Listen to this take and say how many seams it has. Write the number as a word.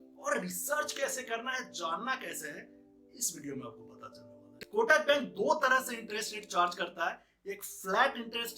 one